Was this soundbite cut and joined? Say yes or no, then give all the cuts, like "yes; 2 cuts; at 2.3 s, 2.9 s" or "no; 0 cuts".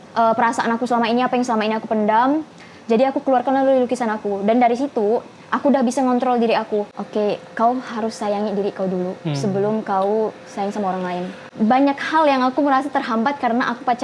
yes; 2 cuts; at 7.0 s, 11.4 s